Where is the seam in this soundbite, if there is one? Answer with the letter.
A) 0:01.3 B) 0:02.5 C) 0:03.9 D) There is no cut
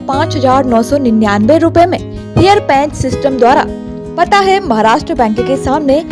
C